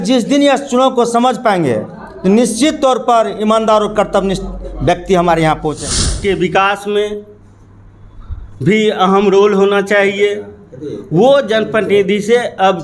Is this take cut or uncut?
cut